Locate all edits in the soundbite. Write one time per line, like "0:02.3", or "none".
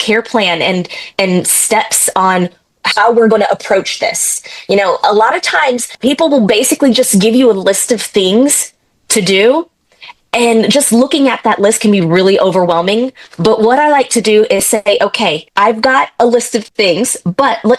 none

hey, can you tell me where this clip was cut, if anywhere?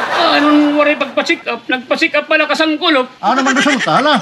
0:03.1

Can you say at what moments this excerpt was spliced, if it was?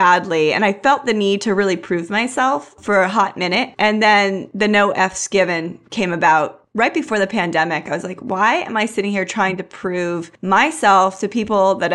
0:02.8
0:06.6
0:10.3

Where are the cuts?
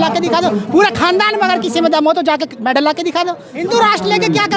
0:03.6

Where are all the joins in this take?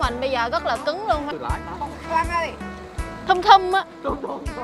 0:01.3

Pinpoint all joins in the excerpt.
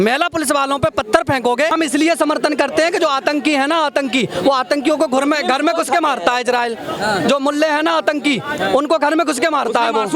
0:01.7

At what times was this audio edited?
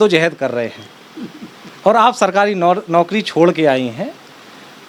none

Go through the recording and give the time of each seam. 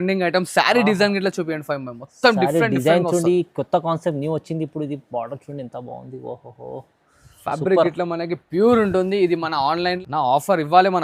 0:10.0

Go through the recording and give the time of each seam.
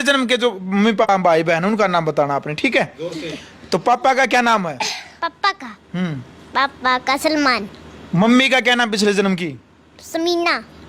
0:01.1

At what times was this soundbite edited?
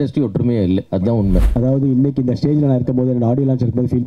0:01.5

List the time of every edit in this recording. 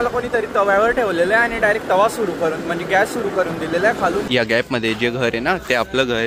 0:04.2

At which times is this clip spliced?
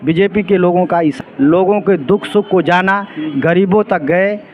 0:01.2

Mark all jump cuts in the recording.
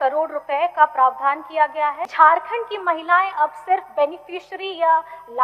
0:02.1

